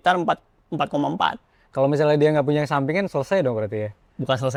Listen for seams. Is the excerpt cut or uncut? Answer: uncut